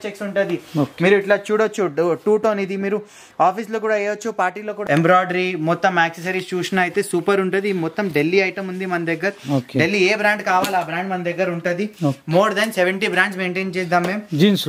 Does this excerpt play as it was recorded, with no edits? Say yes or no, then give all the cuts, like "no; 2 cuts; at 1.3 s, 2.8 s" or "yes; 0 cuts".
no; 1 cut; at 4.7 s